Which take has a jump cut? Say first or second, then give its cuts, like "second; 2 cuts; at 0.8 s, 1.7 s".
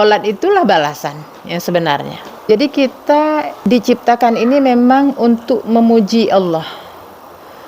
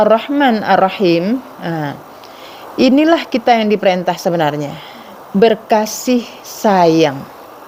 first; 2 cuts; at 2.5 s, 3.5 s